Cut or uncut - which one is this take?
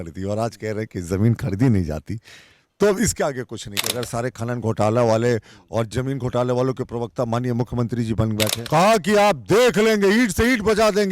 cut